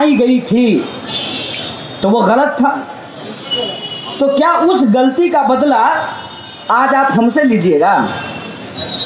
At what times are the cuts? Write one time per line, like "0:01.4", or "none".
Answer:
none

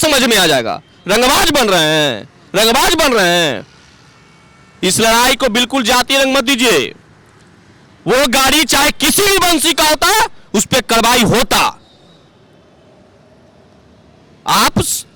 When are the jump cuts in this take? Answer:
none

